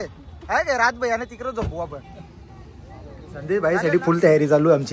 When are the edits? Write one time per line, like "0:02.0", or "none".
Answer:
0:03.3